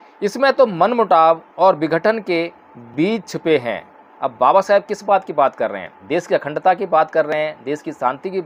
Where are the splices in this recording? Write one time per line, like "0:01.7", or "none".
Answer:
none

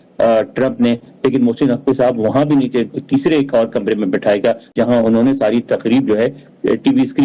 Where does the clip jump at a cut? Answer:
0:04.7

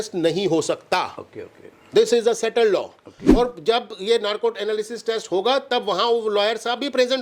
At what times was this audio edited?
0:03.2

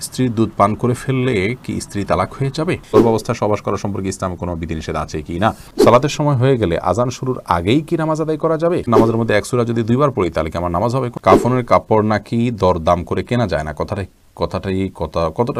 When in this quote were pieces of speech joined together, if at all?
0:02.9
0:05.7
0:08.8
0:11.2

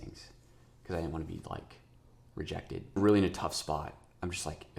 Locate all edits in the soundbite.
0:03.0

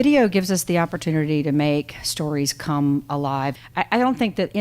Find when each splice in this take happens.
0:03.5

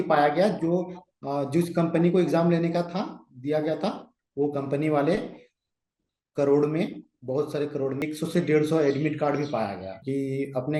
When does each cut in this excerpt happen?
0:08.0
0:10.0

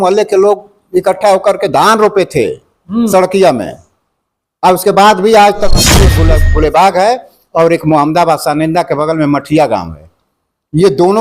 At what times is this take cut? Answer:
0:06.1

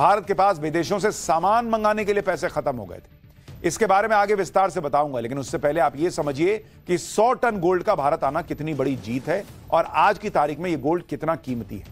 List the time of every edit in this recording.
0:01.0

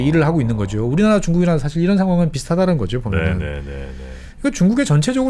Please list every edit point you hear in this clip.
none

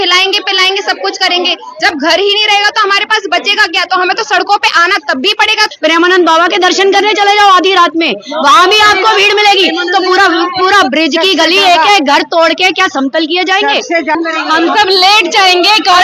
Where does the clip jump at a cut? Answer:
0:05.7
0:14.1

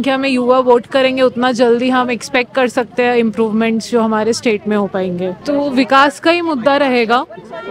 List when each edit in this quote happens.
0:05.4

